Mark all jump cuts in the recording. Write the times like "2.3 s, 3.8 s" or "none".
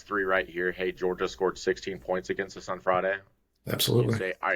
none